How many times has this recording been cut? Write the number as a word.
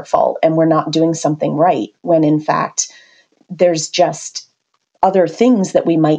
zero